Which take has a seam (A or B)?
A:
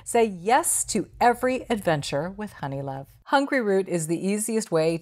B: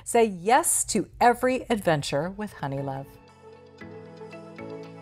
A